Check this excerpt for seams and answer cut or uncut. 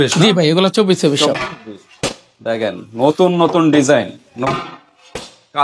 uncut